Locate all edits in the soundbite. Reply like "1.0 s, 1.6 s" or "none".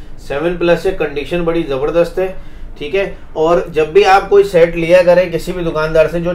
none

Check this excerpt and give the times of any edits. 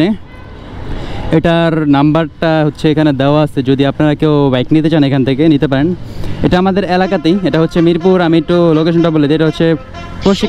none

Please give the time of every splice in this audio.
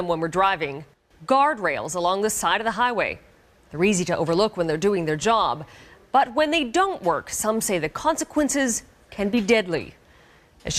none

